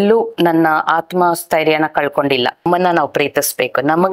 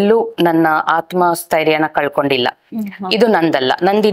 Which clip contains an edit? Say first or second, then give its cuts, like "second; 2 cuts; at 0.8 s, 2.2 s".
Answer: first; 1 cut; at 2.6 s